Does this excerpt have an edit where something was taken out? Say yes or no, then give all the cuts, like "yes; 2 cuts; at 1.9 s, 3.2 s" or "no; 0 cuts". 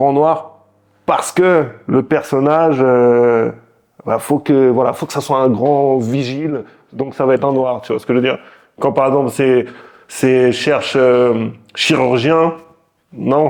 no; 0 cuts